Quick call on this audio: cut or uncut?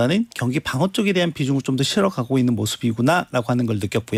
uncut